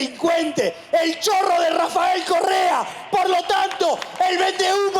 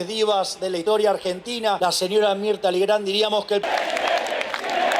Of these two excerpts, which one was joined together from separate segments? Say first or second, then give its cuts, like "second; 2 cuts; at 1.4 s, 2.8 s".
second; 3 cuts; at 0.8 s, 1.8 s, 3.6 s